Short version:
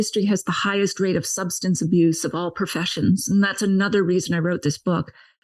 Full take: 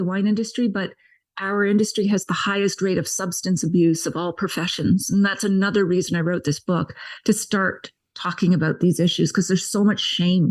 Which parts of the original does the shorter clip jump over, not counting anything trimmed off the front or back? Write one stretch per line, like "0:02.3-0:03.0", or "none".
none